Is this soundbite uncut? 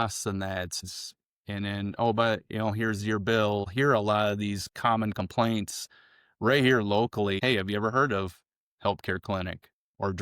no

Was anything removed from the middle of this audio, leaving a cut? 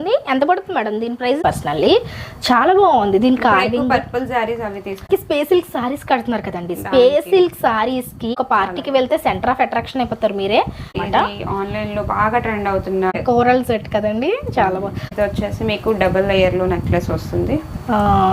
yes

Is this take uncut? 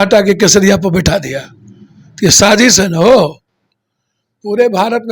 yes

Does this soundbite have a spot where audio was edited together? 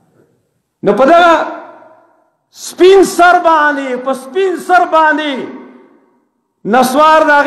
no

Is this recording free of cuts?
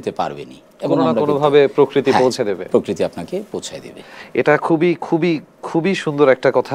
yes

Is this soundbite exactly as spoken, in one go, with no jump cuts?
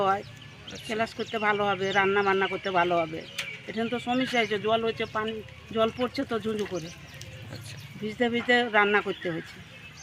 yes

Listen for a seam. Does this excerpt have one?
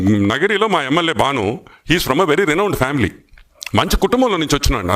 no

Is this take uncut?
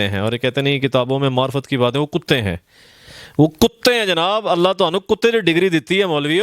yes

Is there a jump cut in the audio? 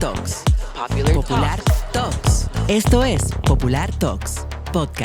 no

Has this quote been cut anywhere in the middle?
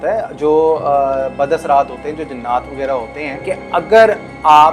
yes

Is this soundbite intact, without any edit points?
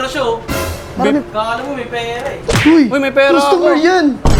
yes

